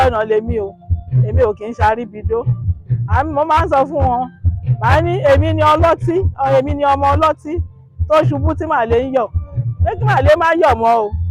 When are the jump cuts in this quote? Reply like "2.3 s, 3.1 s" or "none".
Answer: none